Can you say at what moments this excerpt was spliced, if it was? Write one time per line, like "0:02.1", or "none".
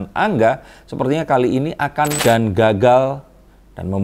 0:02.2